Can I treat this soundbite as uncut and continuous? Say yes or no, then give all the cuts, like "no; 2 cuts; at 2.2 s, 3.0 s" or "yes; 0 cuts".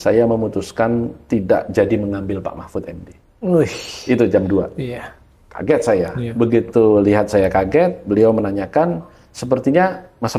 yes; 0 cuts